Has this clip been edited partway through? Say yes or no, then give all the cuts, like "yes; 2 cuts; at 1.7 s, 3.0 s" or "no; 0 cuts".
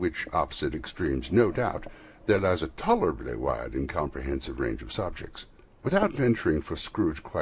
yes; 1 cut; at 2.9 s